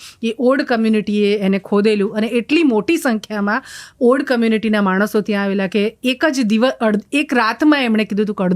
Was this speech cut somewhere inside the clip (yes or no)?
no